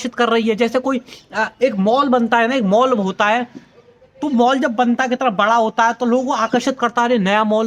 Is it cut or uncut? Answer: uncut